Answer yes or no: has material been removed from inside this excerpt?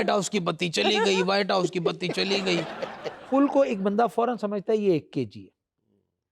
yes